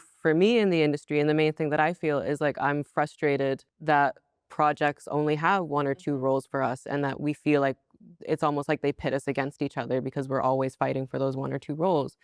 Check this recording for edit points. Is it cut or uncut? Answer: uncut